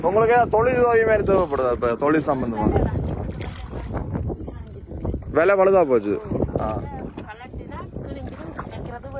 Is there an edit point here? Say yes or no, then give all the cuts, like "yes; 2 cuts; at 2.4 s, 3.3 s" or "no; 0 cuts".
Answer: no; 0 cuts